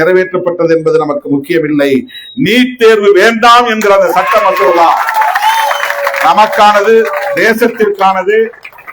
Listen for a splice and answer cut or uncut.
uncut